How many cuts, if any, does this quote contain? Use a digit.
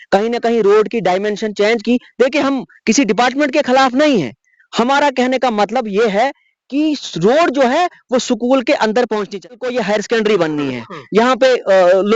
1